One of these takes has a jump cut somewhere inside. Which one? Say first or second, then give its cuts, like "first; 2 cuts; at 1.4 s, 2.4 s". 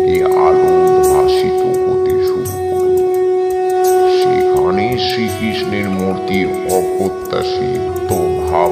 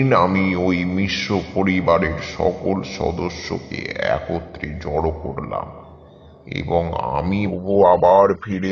second; 1 cut; at 7.5 s